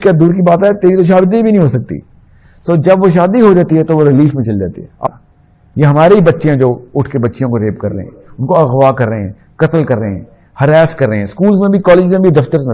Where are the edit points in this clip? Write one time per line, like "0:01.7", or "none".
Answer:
0:05.0

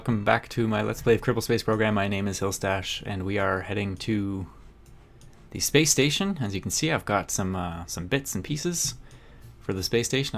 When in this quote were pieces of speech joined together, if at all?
none

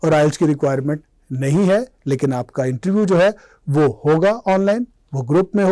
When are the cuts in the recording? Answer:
none

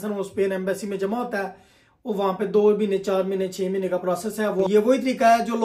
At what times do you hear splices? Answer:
0:04.7

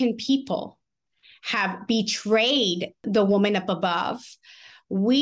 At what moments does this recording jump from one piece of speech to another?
0:03.0

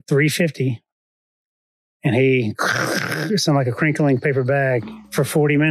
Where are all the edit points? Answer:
none

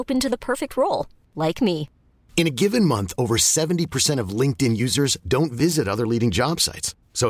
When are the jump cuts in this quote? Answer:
none

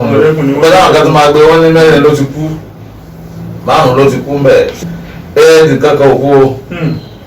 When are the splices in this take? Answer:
0:04.8

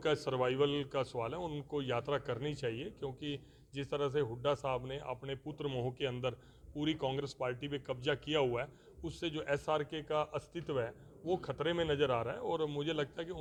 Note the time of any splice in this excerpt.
none

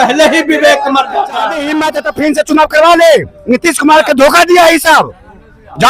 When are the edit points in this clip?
0:01.7

